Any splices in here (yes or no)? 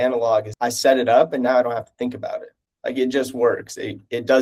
no